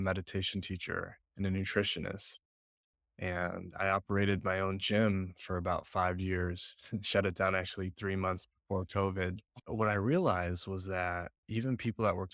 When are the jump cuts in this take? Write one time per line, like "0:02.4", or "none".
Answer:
none